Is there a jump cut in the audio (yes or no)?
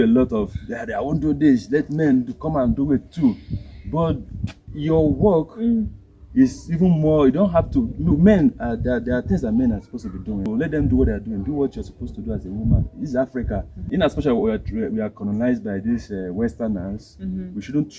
yes